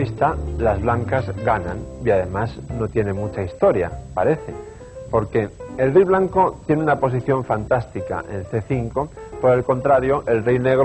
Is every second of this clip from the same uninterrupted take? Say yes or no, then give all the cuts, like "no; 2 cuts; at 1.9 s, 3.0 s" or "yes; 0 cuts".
yes; 0 cuts